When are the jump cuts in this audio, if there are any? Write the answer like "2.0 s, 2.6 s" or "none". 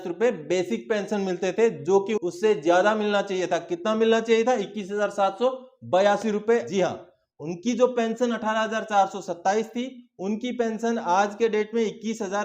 2.1 s, 6.7 s